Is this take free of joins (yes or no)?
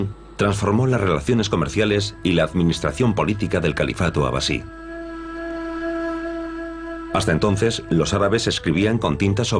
yes